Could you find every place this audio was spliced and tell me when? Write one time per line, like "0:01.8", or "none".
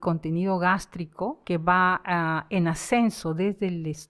0:01.4